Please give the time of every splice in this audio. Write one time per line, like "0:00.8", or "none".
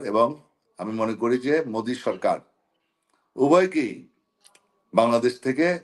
none